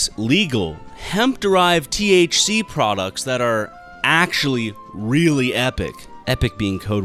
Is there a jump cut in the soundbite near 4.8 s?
no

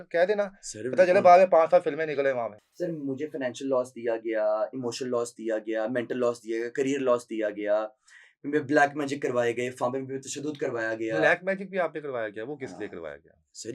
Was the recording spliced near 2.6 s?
yes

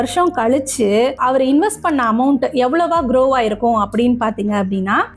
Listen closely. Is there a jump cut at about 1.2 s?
yes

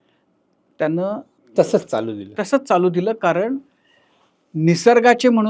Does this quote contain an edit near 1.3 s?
yes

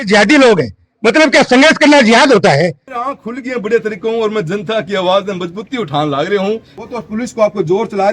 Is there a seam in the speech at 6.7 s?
yes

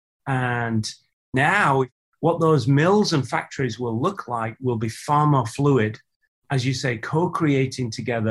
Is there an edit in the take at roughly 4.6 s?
no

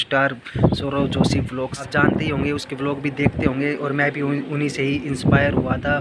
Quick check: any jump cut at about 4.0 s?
no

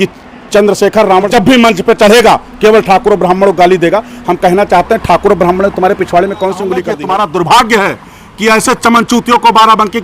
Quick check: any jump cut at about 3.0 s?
no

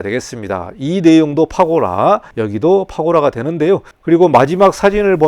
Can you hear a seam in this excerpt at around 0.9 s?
no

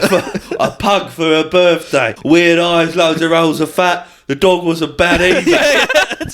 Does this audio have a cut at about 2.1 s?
yes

